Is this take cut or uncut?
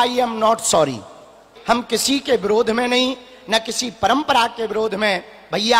cut